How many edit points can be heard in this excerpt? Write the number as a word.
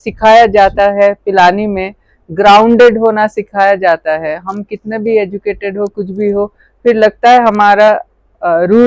zero